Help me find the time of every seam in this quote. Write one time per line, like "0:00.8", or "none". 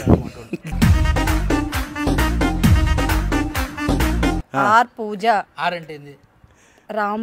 0:01.0
0:04.4